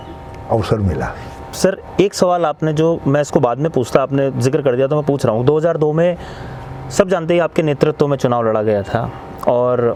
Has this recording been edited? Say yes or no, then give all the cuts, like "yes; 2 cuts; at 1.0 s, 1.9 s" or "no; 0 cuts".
no; 0 cuts